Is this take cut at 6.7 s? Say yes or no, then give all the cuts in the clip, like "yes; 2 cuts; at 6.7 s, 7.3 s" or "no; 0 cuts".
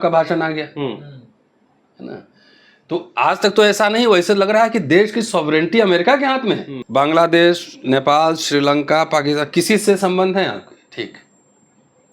yes; 1 cut; at 6.7 s